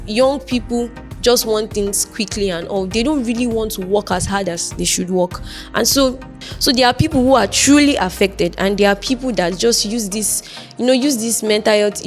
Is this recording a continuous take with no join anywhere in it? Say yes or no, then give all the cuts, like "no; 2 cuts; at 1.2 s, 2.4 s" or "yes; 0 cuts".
no; 1 cut; at 6.5 s